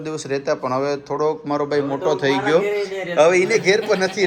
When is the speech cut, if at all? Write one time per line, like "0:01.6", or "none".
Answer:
none